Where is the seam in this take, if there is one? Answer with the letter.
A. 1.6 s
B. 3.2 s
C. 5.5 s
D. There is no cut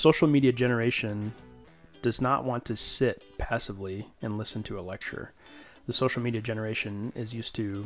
D